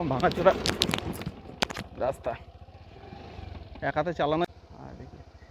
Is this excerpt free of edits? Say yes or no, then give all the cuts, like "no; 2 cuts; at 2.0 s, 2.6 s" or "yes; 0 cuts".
no; 1 cut; at 4.4 s